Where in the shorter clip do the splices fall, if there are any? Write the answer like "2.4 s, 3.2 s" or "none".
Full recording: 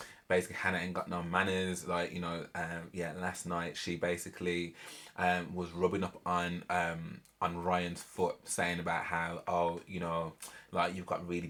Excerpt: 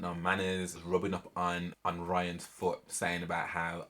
0.8 s, 1.7 s